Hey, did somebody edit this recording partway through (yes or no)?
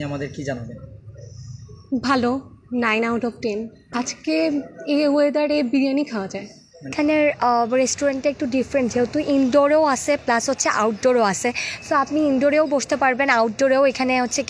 yes